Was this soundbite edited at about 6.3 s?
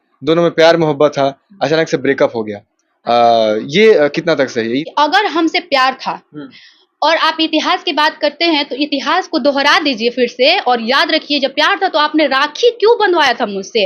no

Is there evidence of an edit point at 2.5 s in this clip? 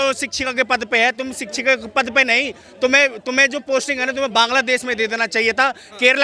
no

